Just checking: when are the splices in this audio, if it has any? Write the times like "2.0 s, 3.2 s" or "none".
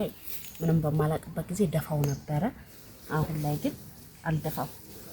none